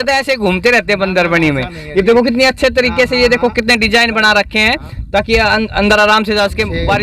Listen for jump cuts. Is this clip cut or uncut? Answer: uncut